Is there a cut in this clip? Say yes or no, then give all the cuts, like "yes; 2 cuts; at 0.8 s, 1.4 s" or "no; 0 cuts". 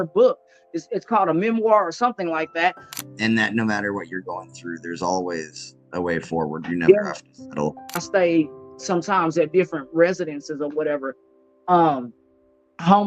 yes; 2 cuts; at 3.0 s, 8.0 s